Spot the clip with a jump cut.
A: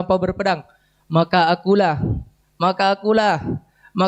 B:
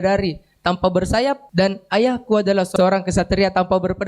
B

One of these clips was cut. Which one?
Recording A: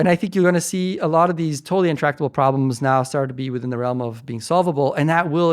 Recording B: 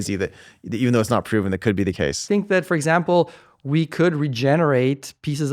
B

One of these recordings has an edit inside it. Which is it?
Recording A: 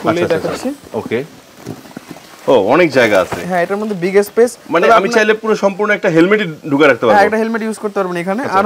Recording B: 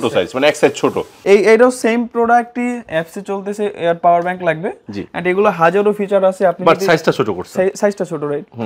B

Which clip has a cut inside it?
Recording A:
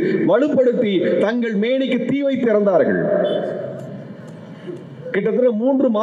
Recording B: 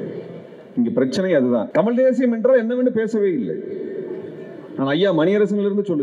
B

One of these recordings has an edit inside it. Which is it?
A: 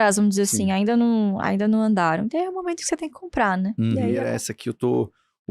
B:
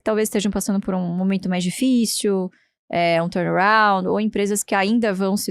A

